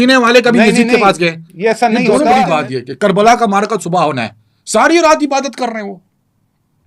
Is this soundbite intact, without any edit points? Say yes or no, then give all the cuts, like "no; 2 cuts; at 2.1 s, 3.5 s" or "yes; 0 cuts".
no; 1 cut; at 2.5 s